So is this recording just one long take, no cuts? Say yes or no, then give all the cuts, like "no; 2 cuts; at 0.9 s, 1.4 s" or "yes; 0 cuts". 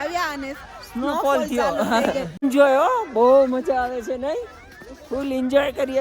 no; 1 cut; at 2.4 s